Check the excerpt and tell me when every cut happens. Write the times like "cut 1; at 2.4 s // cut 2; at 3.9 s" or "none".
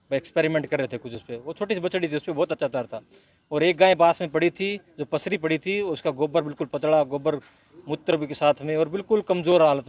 none